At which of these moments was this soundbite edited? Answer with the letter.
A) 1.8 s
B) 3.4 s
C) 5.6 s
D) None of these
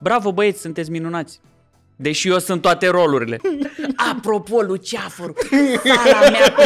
B